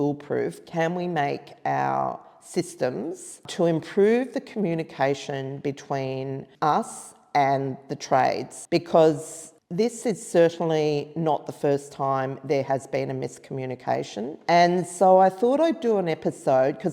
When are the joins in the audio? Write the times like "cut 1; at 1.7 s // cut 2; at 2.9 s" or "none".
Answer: cut 1; at 3.4 s // cut 2; at 6.5 s // cut 3; at 8.5 s // cut 4; at 14.4 s